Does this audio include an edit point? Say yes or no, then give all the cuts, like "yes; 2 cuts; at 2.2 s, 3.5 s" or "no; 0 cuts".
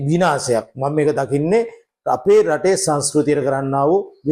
no; 0 cuts